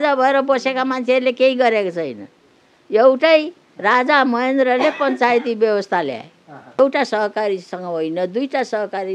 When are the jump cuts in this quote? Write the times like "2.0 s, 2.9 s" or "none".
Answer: 6.8 s